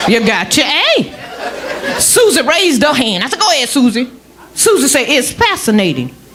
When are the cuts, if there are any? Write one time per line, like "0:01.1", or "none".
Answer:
none